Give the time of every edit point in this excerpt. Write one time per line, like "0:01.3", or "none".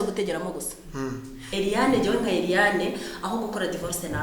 0:01.5